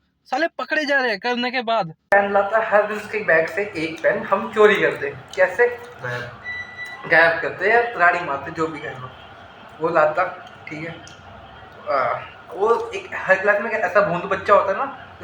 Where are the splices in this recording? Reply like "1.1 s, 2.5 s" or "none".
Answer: 2.1 s